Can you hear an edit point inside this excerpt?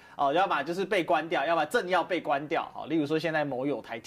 no; 0 cuts

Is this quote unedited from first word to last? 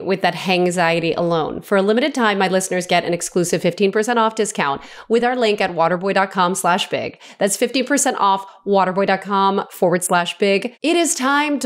no; 1 cut; at 10.7 s

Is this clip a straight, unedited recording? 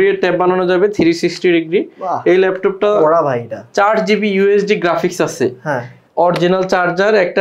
no; 1 cut; at 6.0 s

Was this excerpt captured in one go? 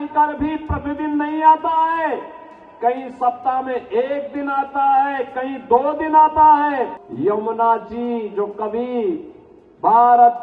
no; 1 cut; at 7.0 s

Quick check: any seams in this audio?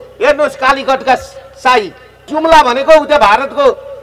yes; 1 cut; at 2.3 s

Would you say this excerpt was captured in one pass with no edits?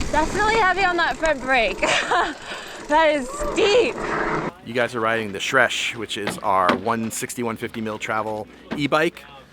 no; 1 cut; at 4.5 s

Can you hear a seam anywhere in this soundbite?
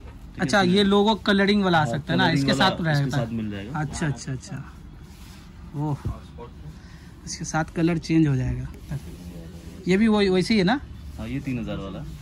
no; 0 cuts

